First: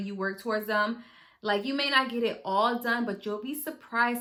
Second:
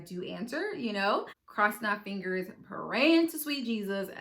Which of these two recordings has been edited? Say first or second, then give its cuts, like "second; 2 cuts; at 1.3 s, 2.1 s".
second; 1 cut; at 1.4 s